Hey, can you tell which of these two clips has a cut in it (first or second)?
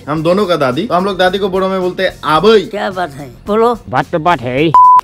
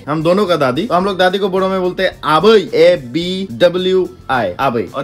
first